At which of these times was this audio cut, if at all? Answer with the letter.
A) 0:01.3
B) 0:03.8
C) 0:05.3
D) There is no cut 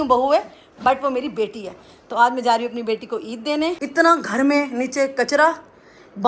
B